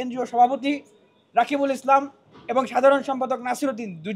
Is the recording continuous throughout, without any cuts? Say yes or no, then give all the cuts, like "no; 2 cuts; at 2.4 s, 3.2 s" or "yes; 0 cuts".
yes; 0 cuts